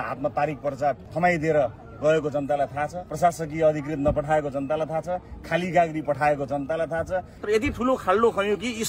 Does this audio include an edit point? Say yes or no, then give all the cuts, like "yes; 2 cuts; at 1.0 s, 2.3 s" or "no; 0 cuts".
yes; 3 cuts; at 1.1 s, 3.0 s, 7.3 s